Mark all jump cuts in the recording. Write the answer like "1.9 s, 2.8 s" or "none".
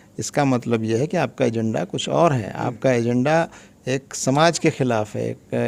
none